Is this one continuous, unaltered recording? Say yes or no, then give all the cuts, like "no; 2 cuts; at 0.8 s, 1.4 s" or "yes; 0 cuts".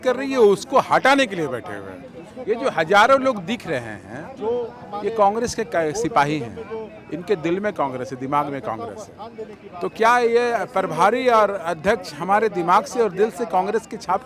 yes; 0 cuts